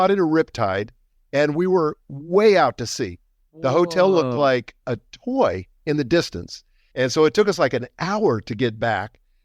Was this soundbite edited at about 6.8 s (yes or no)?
yes